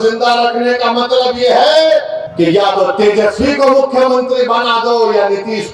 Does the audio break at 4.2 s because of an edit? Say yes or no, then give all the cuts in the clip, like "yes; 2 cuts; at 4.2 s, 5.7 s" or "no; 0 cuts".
no; 1 cut; at 2.2 s